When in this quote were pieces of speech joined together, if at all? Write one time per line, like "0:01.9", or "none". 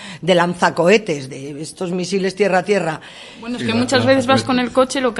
0:03.4